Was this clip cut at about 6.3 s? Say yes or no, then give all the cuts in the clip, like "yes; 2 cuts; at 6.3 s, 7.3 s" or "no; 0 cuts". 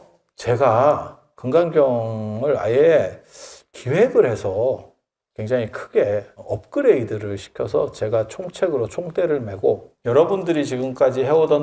yes; 3 cuts; at 1.3 s, 6.3 s, 9.9 s